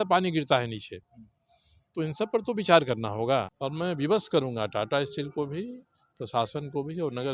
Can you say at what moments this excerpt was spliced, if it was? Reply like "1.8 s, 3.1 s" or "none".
3.6 s